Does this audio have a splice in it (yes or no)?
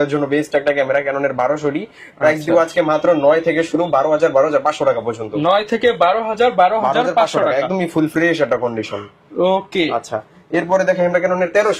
no